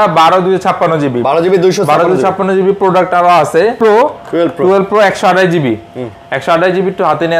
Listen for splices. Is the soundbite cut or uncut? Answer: cut